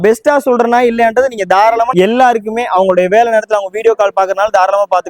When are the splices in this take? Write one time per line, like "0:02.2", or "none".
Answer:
0:01.9